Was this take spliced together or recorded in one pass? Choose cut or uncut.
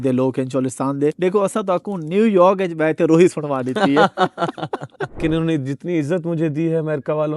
cut